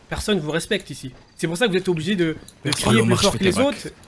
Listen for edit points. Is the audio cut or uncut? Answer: uncut